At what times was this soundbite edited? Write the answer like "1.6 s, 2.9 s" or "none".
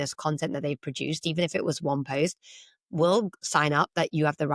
none